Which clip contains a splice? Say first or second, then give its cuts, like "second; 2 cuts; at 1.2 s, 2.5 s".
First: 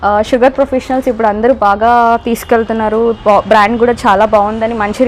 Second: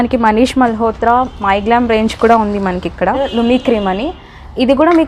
second; 1 cut; at 3.3 s